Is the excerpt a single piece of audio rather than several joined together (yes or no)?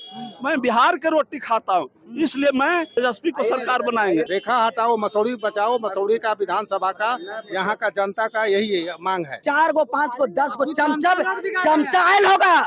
no